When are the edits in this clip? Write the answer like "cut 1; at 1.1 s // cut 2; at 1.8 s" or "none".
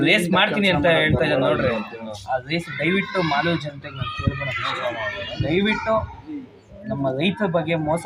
none